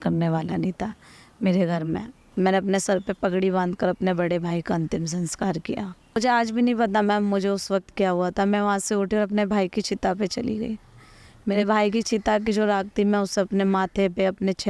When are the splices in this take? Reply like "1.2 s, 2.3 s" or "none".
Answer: 2.2 s, 6.2 s